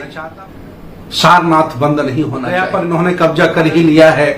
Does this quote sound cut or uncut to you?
cut